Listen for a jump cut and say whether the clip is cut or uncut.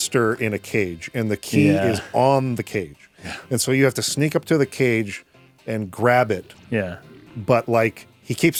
uncut